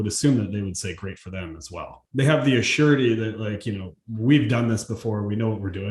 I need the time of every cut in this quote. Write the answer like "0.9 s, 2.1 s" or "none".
2.0 s